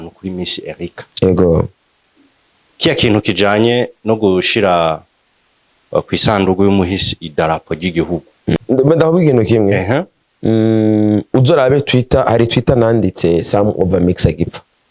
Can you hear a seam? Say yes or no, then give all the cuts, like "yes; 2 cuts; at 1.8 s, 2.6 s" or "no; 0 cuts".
yes; 1 cut; at 8.6 s